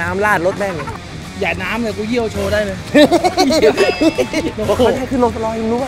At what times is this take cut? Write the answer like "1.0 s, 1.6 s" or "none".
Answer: 4.5 s